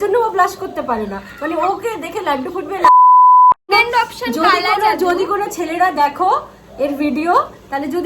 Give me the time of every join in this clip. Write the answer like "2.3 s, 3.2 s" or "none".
2.7 s, 3.7 s